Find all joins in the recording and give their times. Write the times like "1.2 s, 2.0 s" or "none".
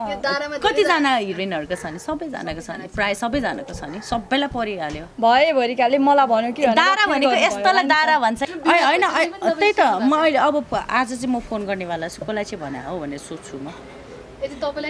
8.4 s